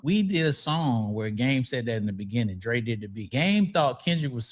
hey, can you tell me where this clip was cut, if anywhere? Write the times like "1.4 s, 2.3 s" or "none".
3.3 s